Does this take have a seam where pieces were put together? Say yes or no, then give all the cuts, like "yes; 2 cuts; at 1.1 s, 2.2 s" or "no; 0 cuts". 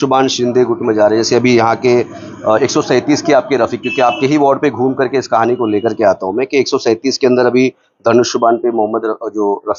no; 0 cuts